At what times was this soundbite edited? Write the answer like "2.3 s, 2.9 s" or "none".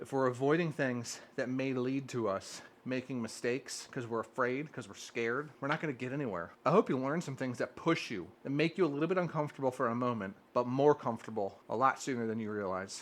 5.5 s, 6.5 s, 8.3 s, 10.3 s, 11.6 s